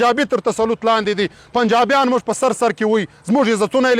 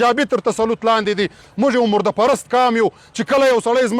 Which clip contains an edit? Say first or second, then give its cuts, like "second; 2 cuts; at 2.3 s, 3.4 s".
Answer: second; 1 cut; at 1.4 s